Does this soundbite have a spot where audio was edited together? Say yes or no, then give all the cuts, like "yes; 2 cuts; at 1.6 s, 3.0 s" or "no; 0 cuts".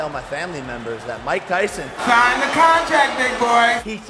no; 0 cuts